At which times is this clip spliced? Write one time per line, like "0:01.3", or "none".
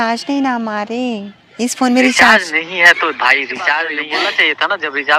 0:03.8